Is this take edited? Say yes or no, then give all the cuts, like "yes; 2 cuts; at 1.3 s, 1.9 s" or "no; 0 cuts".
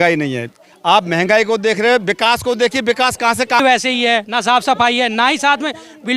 yes; 1 cut; at 3.6 s